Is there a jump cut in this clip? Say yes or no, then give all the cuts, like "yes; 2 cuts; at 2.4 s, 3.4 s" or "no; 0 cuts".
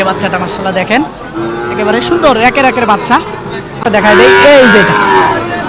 yes; 1 cut; at 3.8 s